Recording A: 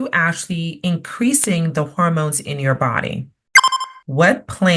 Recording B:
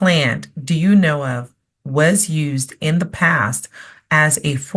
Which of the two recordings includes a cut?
A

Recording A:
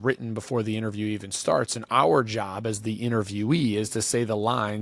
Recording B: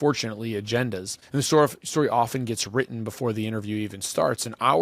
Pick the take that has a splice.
B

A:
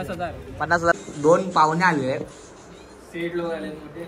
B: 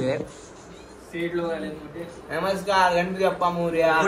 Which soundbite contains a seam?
A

